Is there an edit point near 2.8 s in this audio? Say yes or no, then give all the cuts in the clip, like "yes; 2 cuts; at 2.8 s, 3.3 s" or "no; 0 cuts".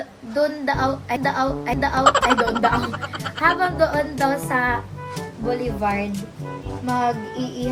no; 0 cuts